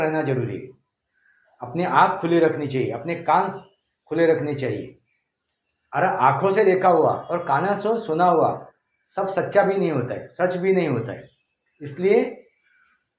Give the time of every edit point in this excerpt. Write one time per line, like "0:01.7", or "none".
none